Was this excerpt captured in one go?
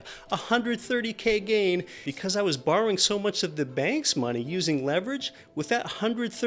no; 1 cut; at 2.1 s

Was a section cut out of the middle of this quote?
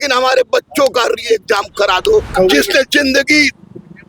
yes; 1 cut; at 2.3 s

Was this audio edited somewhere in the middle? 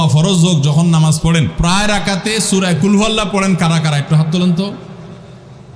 yes; 1 cut; at 1.5 s

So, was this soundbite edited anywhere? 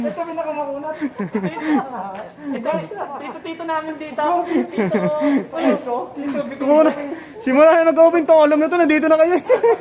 no; 0 cuts

